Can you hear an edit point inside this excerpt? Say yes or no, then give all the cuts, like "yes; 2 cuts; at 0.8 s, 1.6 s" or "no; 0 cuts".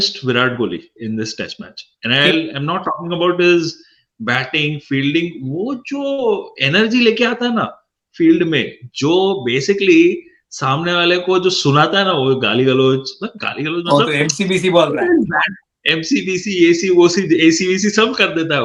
no; 0 cuts